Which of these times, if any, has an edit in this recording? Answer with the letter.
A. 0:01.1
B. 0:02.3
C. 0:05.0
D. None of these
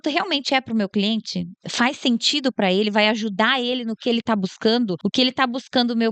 C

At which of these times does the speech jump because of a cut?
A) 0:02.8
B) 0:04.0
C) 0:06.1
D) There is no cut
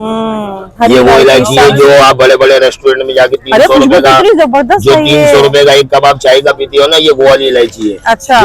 D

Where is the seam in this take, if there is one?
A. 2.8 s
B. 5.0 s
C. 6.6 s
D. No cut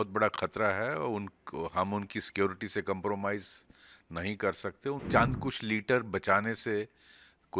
B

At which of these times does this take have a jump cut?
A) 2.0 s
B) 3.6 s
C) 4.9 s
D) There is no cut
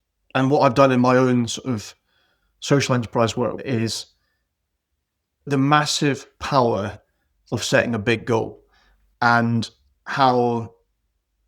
B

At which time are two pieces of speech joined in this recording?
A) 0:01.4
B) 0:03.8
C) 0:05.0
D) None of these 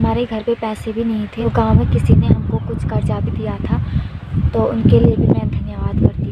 A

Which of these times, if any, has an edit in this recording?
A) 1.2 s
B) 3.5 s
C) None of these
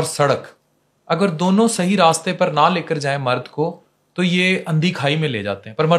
C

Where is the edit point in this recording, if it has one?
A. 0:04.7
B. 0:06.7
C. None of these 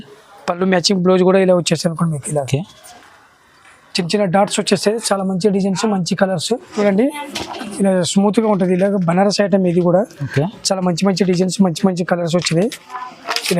B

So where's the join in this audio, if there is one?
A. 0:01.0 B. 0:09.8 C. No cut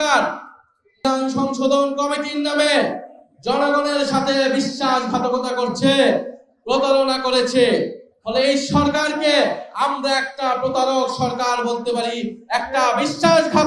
A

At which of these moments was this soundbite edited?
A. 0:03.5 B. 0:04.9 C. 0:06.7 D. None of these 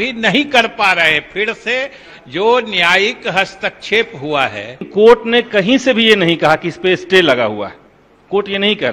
B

